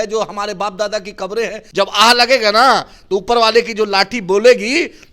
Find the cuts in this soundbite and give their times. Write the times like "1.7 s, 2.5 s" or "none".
1.6 s